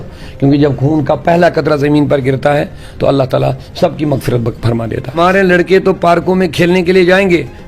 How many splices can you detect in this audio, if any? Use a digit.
1